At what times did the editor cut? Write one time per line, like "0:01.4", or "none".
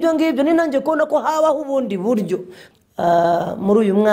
0:02.6

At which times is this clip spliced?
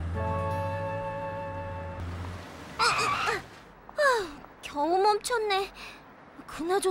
0:02.1

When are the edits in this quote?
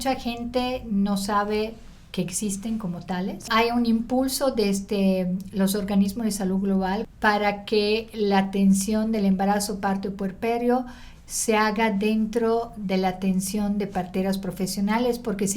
0:03.5
0:07.1

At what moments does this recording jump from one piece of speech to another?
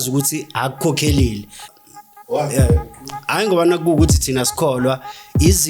0:01.7

